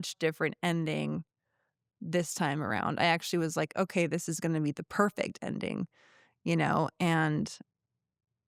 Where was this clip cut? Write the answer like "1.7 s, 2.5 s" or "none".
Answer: none

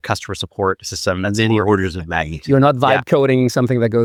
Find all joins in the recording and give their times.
none

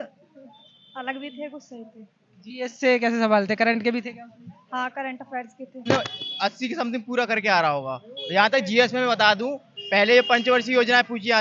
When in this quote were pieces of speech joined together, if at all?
5.8 s

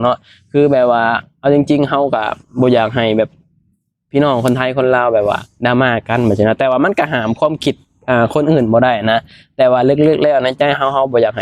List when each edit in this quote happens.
none

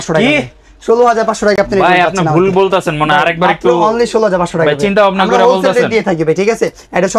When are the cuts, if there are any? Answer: none

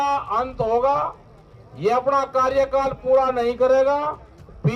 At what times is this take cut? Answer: none

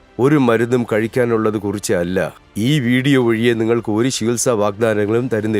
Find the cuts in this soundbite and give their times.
2.4 s

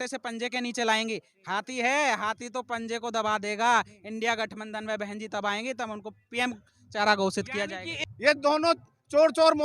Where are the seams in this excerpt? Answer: 7.9 s

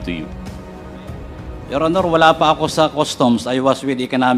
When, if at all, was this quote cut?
none

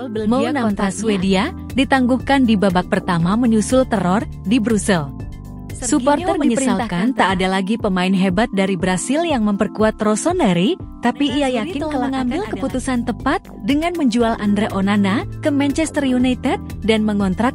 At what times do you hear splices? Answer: 6.8 s, 11.9 s

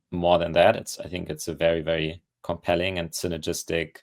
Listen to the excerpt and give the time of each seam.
2.3 s

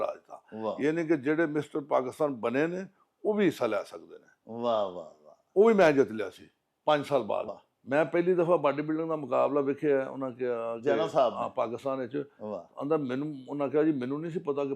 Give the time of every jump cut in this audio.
7.5 s

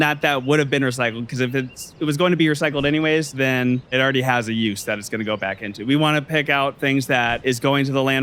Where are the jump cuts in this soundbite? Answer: 3.9 s, 7.4 s

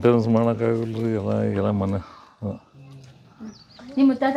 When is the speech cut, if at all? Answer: none

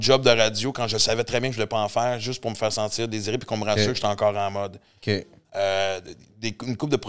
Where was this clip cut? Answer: none

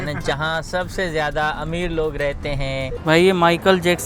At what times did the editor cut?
2.9 s

